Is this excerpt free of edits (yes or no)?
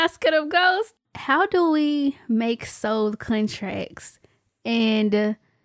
no